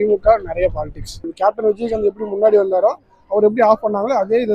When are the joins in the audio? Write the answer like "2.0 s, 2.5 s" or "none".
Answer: 1.1 s